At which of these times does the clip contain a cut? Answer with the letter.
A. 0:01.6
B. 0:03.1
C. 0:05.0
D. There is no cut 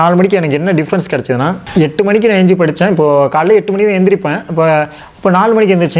D